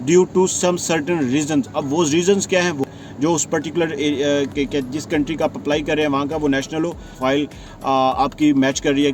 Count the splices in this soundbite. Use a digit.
2